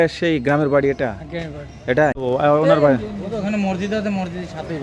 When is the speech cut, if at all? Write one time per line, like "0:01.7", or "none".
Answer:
0:02.2

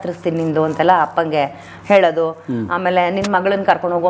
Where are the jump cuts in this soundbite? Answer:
none

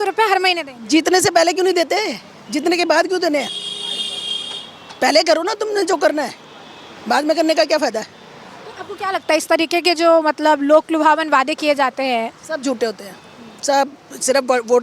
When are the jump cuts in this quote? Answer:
none

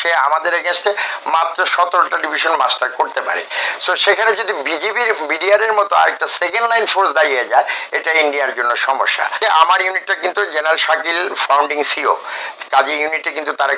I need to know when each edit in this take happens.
0:09.4

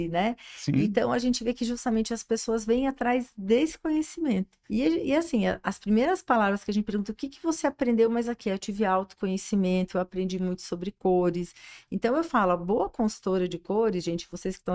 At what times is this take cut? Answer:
0:04.6

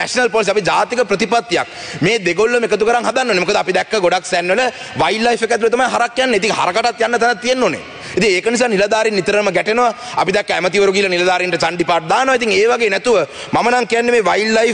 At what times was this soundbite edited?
none

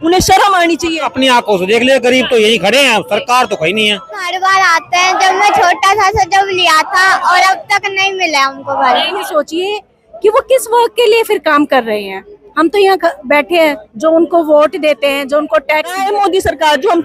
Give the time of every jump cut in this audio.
0:01.0
0:04.3
0:09.2
0:16.0

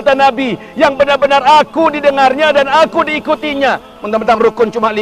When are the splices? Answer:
0:03.9

